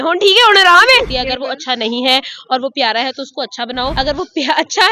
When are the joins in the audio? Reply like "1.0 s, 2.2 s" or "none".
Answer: 1.1 s, 3.9 s